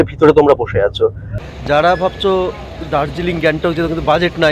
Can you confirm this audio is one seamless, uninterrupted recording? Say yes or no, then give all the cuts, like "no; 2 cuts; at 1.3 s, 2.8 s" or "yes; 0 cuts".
no; 1 cut; at 1.3 s